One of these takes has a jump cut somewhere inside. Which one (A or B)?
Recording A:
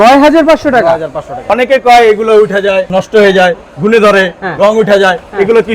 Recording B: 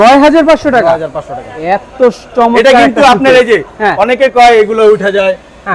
A